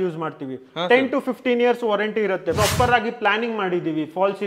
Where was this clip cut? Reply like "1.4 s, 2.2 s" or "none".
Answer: 2.6 s